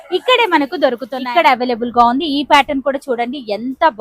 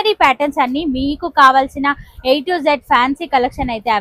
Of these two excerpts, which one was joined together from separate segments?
first; 1 cut; at 1.1 s

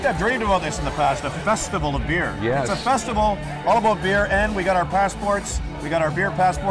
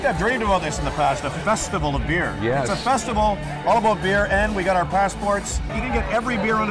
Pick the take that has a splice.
second; 1 cut; at 5.7 s

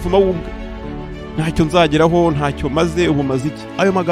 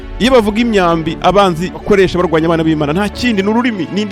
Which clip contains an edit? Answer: second; 1 cut; at 1.8 s

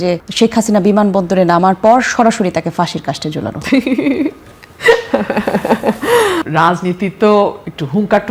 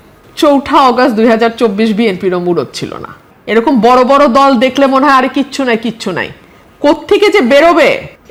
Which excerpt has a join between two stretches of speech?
first; 1 cut; at 6.4 s

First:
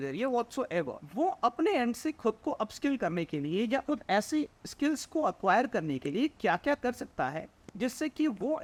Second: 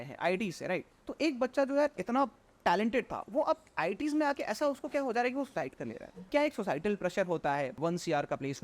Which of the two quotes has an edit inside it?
second; 2 cuts; at 6.3 s, 7.8 s

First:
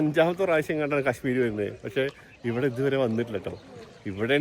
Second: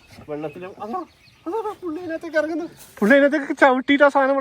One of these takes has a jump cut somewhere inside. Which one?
second; 1 cut; at 2.8 s

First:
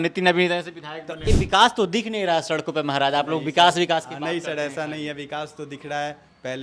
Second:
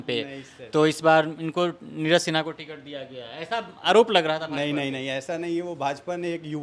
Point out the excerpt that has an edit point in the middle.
first; 1 cut; at 1.2 s

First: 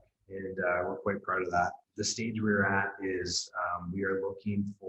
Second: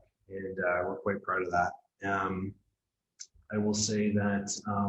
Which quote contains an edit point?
first; 1 cut; at 1.8 s

